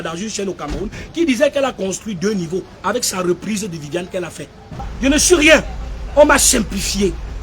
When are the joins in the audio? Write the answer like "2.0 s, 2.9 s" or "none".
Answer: 4.9 s